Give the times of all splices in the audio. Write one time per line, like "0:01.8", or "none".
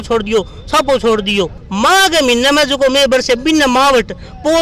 0:01.6